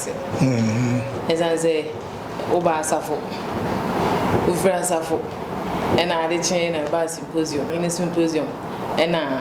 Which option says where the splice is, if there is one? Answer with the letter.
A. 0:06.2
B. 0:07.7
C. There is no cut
B